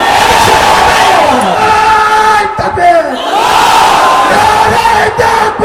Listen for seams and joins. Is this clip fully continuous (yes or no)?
no